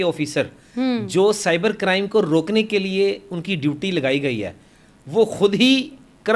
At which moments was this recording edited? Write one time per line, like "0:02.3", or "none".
none